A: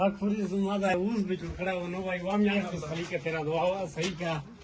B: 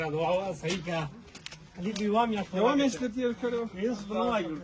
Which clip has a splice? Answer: A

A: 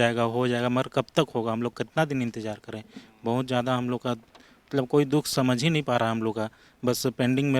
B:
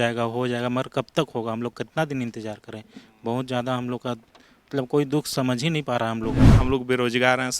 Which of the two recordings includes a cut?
B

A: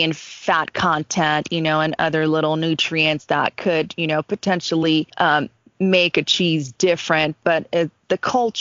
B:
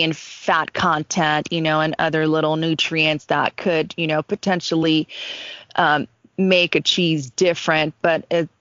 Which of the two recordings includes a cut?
A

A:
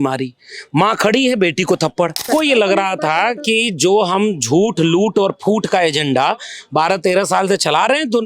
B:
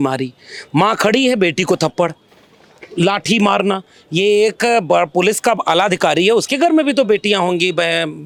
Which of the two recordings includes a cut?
A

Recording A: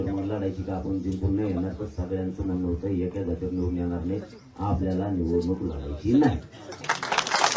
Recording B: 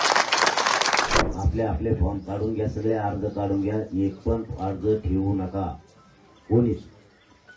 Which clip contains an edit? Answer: B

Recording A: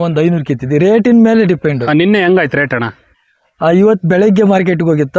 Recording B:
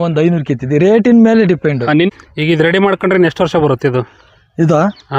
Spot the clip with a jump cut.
B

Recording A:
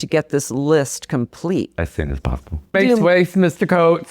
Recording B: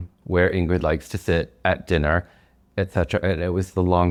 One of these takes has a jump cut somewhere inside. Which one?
A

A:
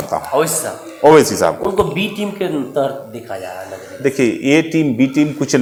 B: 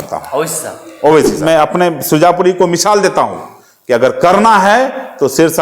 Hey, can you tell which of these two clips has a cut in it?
B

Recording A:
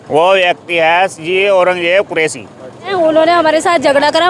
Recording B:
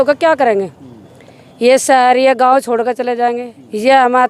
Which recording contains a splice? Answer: A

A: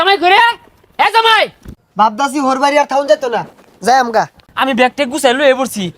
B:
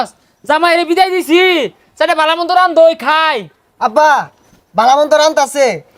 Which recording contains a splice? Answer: A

